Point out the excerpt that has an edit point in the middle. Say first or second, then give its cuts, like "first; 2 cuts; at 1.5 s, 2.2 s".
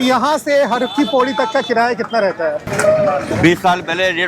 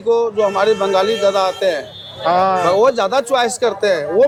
first; 1 cut; at 2.6 s